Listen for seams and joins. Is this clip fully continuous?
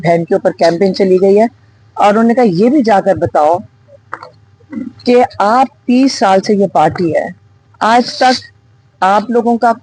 yes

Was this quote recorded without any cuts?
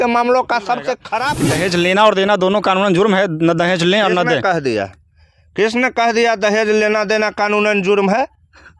no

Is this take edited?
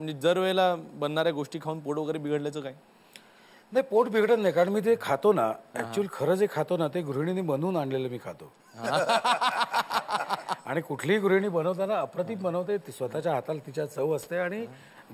no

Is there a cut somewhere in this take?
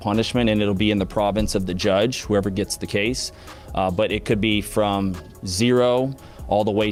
no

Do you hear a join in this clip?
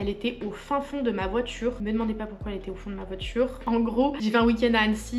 no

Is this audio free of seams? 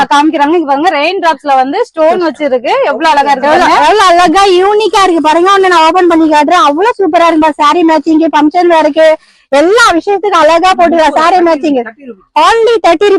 yes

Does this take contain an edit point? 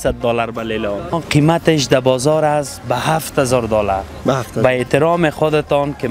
yes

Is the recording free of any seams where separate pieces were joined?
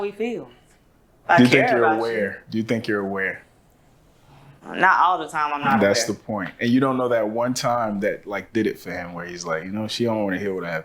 yes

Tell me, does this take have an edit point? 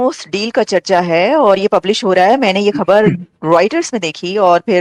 no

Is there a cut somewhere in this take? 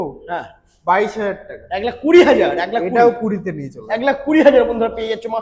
no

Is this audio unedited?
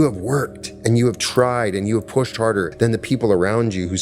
no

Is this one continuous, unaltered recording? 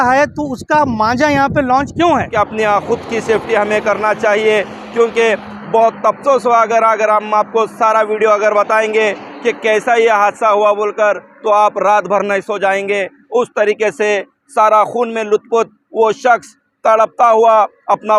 no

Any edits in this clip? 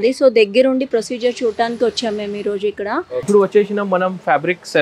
yes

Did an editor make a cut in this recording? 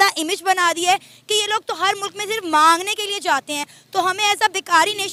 no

